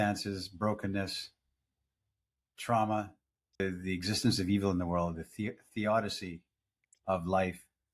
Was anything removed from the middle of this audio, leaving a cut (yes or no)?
yes